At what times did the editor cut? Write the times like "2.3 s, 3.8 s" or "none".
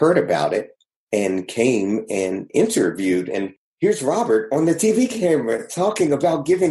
3.6 s

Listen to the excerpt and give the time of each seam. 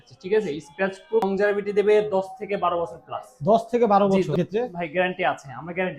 1.2 s, 4.4 s

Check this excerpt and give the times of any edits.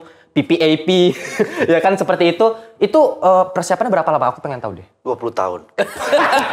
none

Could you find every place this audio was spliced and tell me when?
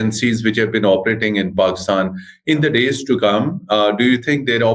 none

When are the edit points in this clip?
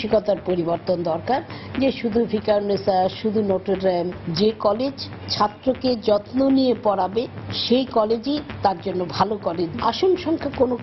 none

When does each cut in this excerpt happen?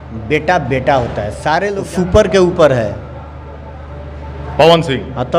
1.8 s

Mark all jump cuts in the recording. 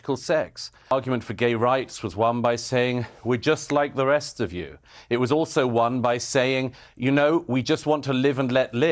0.9 s

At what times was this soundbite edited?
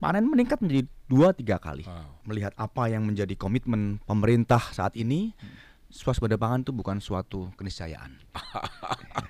2.1 s, 8.4 s

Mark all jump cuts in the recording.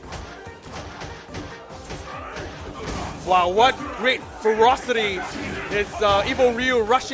6.1 s

